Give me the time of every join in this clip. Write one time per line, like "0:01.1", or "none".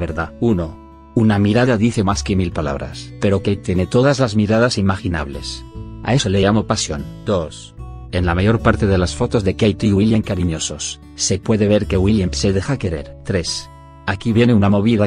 0:07.1